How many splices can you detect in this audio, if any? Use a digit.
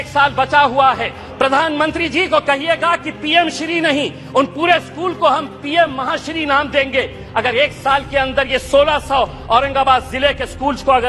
1